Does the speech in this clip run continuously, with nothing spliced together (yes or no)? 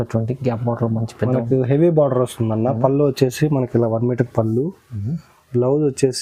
yes